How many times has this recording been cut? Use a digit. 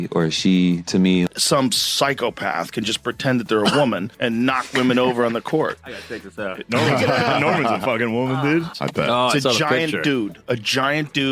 1